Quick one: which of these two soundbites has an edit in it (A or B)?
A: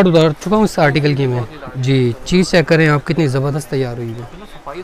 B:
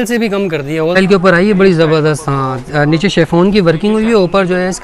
B